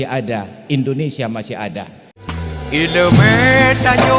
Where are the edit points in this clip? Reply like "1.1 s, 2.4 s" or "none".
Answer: 2.2 s